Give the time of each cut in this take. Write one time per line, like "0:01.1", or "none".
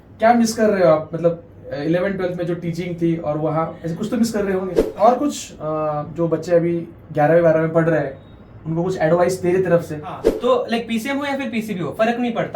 0:04.8
0:10.3